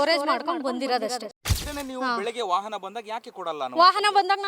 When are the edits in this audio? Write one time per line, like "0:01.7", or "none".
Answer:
0:01.5